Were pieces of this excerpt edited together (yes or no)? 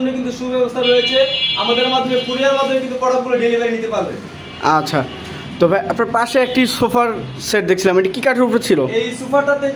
no